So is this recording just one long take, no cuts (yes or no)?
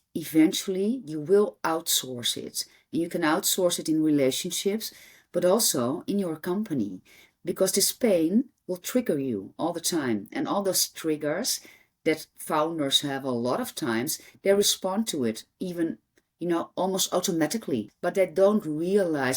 no